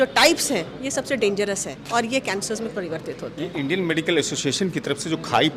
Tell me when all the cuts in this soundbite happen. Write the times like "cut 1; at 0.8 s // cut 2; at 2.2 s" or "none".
none